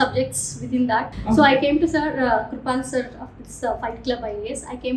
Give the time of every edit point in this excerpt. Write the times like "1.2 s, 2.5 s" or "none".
1.1 s